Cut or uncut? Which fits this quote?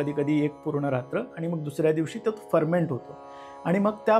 uncut